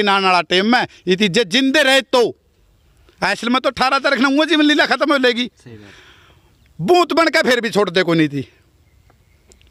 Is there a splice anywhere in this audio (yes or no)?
no